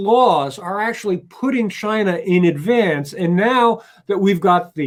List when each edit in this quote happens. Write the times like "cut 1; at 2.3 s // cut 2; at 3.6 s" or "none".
none